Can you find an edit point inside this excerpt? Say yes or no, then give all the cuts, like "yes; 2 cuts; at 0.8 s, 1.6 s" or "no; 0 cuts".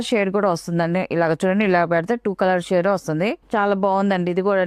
yes; 1 cut; at 3.4 s